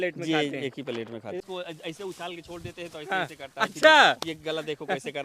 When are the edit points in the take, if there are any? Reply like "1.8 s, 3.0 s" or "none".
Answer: 1.5 s